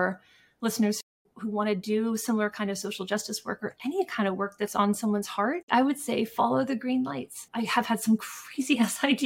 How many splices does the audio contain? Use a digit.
1